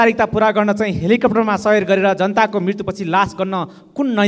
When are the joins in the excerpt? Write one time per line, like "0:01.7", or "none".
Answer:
none

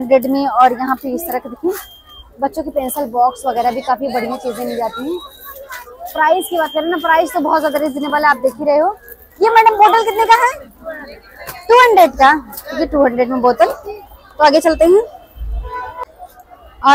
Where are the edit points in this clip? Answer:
none

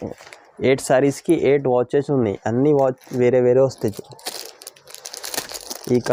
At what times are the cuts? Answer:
none

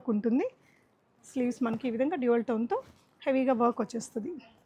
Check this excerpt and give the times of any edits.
none

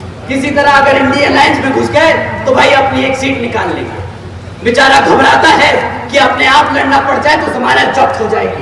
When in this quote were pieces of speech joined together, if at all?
none

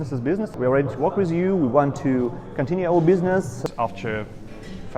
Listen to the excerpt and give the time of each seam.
0:03.5

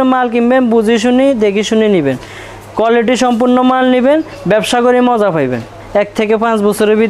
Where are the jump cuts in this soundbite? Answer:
0:05.8

